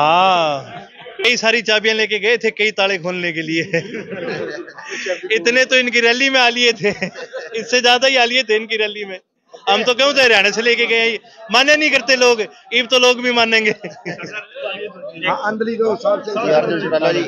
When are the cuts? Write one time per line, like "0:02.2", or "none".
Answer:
0:01.2